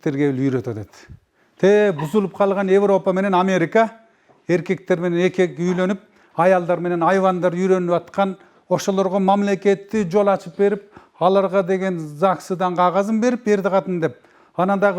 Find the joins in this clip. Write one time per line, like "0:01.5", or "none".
none

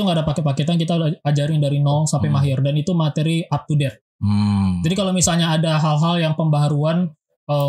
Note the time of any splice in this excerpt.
none

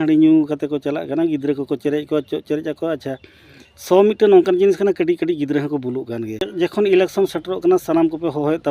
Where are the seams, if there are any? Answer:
0:06.5

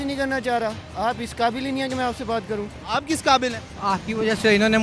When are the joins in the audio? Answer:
0:03.7

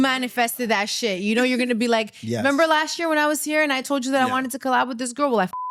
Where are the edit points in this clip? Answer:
none

